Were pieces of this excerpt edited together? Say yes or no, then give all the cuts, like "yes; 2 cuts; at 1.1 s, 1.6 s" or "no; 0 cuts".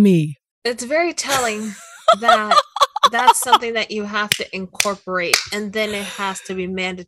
no; 0 cuts